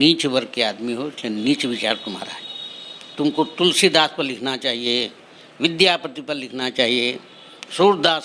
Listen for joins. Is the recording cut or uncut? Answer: uncut